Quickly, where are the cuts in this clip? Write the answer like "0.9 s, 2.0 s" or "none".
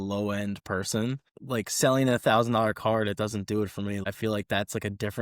1.3 s, 4.0 s

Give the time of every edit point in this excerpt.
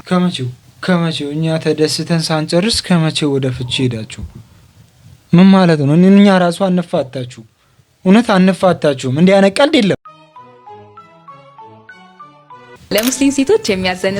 12.9 s

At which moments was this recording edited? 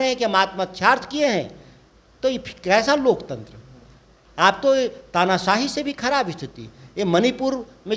none

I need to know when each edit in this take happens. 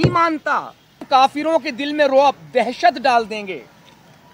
1.0 s

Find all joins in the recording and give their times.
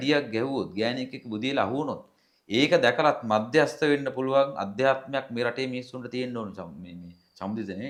none

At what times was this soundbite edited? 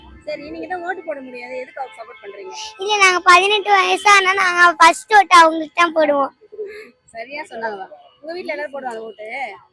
none

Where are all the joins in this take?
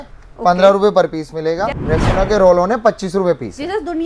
1.7 s

